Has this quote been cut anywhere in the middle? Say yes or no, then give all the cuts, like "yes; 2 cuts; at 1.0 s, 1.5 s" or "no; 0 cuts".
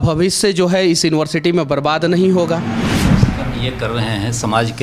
yes; 1 cut; at 2.8 s